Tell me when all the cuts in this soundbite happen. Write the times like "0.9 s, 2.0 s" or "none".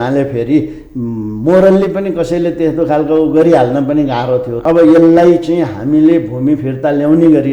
4.5 s